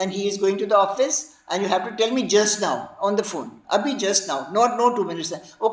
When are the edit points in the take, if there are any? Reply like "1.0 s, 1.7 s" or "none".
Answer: none